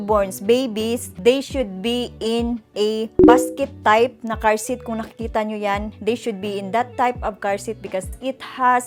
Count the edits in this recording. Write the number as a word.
zero